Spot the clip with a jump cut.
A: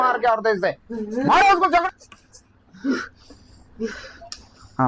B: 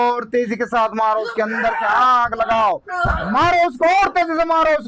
A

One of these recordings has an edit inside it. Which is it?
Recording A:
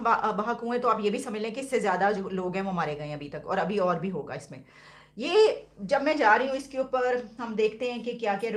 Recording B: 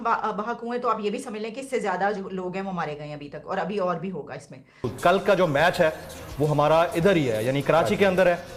B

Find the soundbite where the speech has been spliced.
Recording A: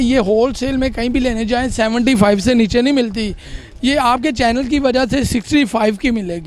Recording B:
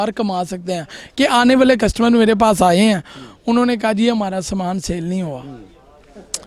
B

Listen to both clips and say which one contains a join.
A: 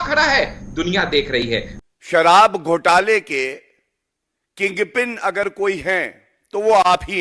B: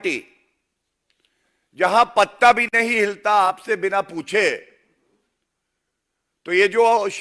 A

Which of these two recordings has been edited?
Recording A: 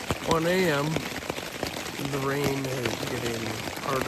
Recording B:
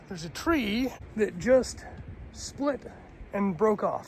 B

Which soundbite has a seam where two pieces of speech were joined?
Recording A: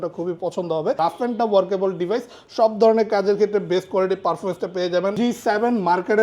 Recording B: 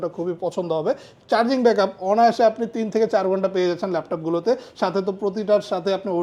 A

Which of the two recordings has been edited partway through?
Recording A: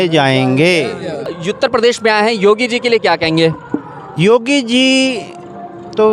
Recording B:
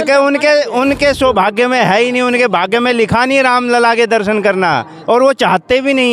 A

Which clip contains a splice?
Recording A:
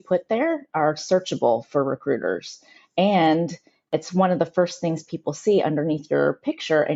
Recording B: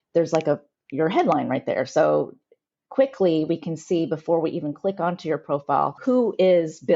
B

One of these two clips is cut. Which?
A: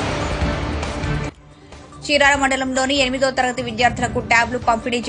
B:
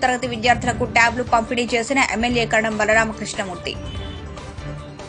A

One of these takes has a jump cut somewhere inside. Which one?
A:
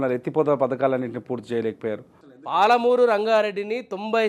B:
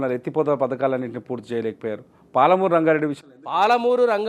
A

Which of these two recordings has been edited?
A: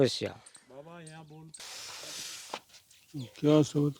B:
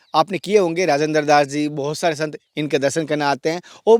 A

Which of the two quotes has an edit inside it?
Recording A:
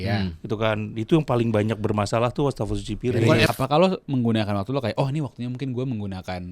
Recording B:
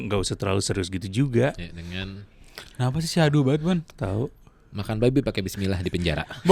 A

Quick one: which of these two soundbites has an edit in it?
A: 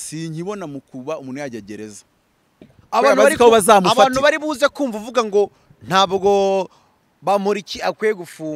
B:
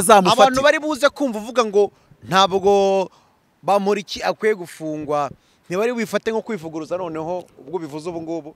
A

